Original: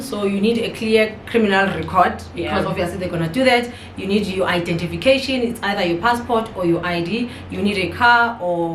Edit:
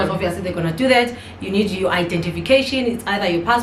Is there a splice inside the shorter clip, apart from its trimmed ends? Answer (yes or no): no